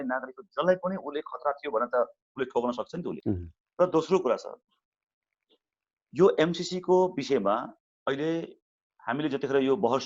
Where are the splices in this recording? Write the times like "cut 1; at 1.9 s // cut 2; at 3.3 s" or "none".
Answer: cut 1; at 3.1 s

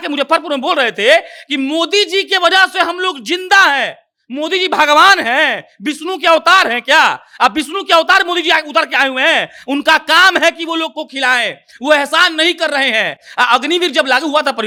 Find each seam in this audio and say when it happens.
none

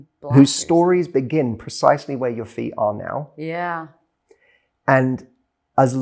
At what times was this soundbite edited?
none

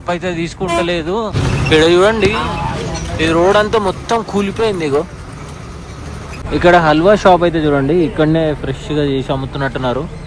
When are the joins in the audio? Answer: none

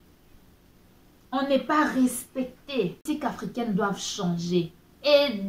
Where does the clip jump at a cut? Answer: cut 1; at 3.0 s

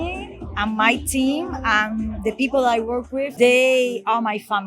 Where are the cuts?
cut 1; at 3.3 s

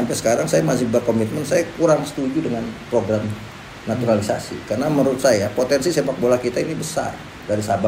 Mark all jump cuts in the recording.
none

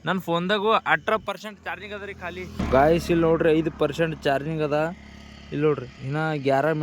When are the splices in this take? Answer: cut 1; at 2.6 s

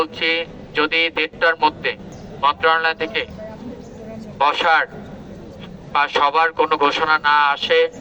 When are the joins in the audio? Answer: cut 1; at 2.1 s

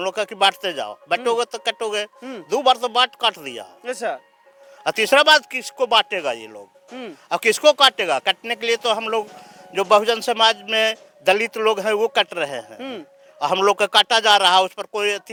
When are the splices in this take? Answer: none

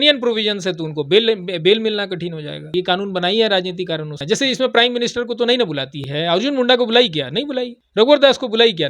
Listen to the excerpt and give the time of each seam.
cut 1; at 2.7 s // cut 2; at 4.2 s // cut 3; at 6.0 s // cut 4; at 7.8 s

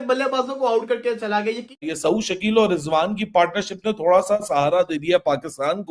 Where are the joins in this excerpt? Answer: cut 1; at 1.9 s

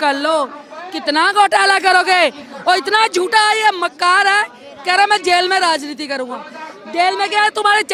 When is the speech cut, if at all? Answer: none

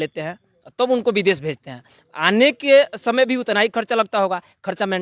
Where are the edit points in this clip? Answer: none

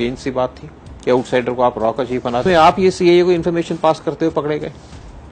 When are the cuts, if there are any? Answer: cut 1; at 2.4 s

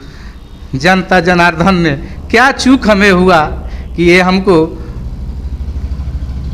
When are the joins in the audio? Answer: none

